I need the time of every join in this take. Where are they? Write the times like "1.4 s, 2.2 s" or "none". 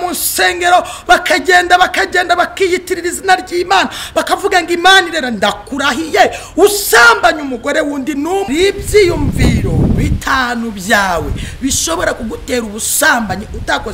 8.5 s